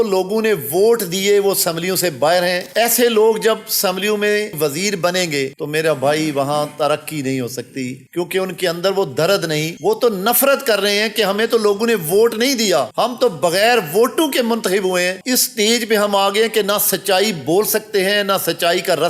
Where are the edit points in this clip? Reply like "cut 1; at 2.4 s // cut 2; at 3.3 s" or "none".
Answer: cut 1; at 2.6 s // cut 2; at 4.5 s // cut 3; at 15.2 s